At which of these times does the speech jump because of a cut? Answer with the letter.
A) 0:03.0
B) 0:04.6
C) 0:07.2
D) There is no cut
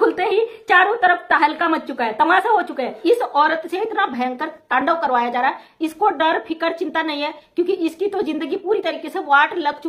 A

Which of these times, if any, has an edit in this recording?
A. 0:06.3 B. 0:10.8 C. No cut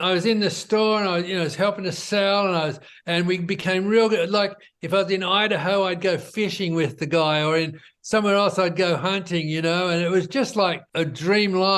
B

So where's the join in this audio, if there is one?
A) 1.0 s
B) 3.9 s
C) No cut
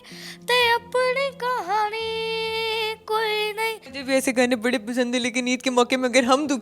B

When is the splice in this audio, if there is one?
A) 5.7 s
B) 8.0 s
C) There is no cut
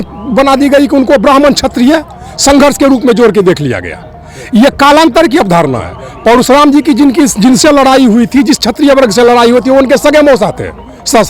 C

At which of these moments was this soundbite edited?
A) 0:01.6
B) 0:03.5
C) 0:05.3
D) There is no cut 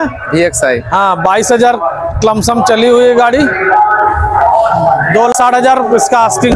C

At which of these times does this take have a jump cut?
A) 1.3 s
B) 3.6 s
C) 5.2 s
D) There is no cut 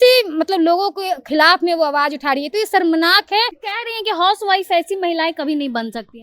B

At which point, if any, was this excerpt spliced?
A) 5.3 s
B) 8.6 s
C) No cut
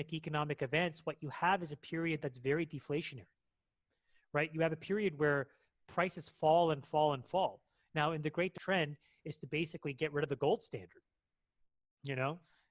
B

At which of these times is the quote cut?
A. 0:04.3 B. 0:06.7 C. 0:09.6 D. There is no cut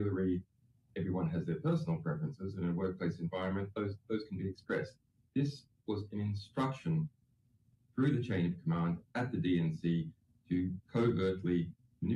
C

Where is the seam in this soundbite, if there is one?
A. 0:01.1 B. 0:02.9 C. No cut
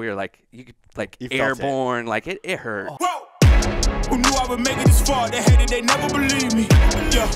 B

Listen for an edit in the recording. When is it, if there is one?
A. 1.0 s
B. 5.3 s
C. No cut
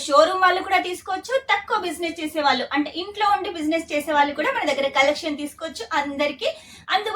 C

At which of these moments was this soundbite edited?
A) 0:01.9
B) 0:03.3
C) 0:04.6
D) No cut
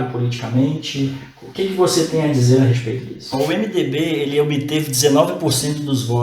B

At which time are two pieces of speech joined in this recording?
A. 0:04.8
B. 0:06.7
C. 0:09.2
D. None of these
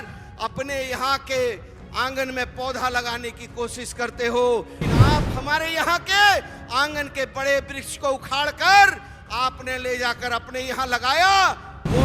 A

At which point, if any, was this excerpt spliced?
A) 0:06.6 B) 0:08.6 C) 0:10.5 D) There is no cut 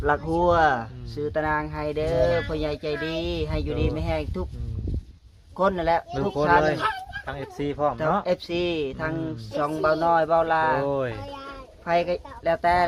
D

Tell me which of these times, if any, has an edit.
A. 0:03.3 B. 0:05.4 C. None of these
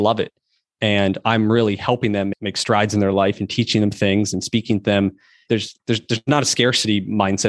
B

